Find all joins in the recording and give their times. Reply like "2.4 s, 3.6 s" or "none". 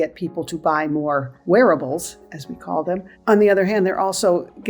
1.3 s, 3.1 s

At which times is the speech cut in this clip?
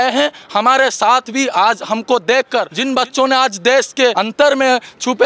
2.8 s, 4.2 s

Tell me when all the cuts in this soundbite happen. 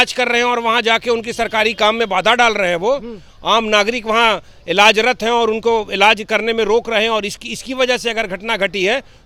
none

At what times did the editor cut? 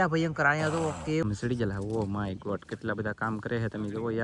1.2 s

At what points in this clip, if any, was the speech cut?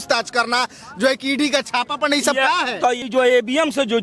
3.0 s

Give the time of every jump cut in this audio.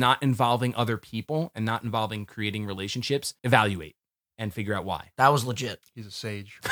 3.3 s, 5.1 s

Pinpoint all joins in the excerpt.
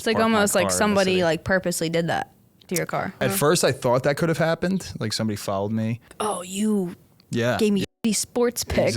3.2 s, 6.1 s

